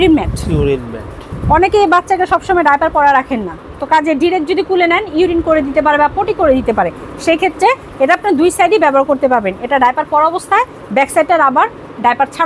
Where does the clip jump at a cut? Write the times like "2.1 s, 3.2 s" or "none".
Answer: none